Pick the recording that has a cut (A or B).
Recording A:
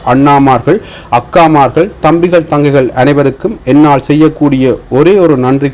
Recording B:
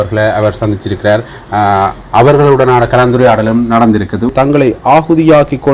B